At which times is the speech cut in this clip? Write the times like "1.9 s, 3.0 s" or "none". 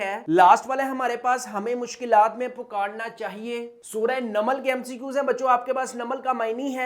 3.8 s